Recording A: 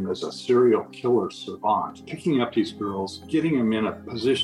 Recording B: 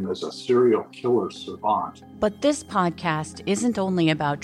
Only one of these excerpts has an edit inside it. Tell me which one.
B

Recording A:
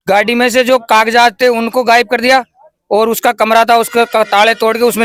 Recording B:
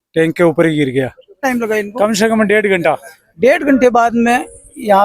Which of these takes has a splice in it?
B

